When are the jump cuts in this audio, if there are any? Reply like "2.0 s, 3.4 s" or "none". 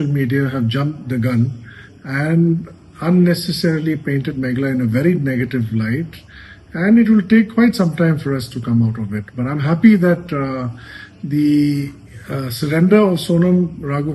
none